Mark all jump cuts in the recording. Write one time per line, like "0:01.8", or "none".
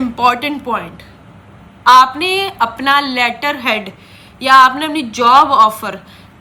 none